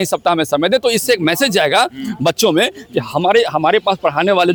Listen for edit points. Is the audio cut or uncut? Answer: uncut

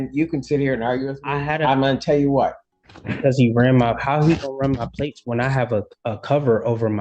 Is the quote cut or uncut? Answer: cut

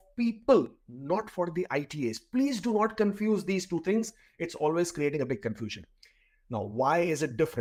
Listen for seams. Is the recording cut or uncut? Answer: uncut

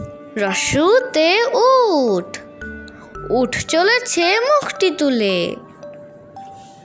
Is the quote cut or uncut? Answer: cut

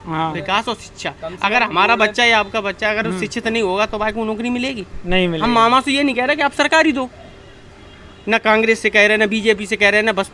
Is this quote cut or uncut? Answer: uncut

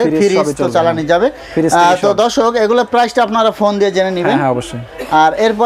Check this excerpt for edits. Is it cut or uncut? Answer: uncut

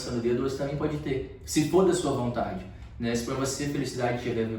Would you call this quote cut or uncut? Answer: uncut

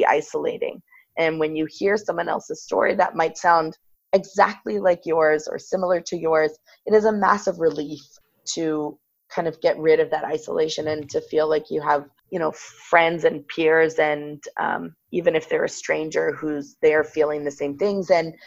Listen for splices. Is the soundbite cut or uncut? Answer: cut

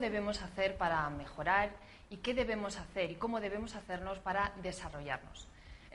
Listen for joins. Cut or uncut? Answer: cut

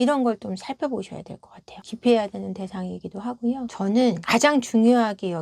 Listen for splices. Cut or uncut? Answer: cut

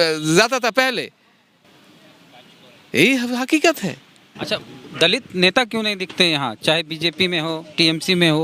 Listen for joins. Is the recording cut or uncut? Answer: uncut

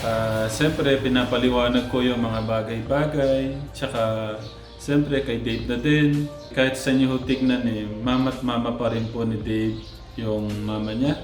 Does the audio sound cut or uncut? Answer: uncut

